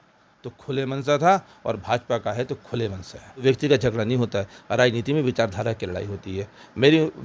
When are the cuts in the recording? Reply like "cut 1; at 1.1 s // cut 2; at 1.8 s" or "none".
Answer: cut 1; at 3.4 s